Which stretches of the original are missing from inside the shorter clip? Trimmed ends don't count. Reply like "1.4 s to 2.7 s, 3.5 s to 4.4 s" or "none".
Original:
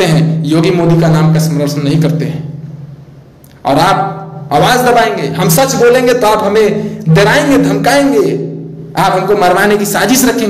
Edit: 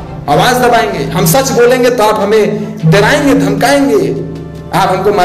none